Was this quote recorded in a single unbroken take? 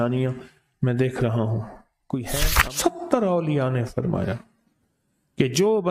no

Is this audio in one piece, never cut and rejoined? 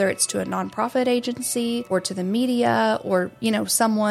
no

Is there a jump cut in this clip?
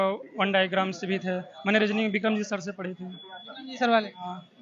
no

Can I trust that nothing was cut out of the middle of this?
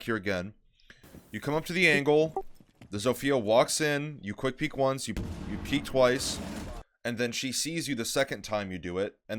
yes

